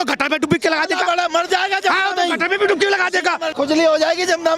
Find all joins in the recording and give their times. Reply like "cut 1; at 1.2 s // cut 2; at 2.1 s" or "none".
cut 1; at 3.5 s